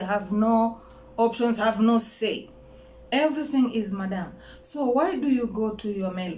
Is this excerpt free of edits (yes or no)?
yes